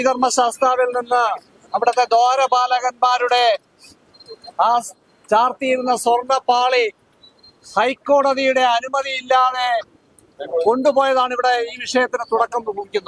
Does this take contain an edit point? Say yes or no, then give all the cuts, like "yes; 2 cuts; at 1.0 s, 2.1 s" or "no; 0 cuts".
no; 0 cuts